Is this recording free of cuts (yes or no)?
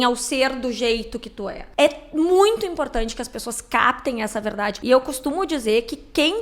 no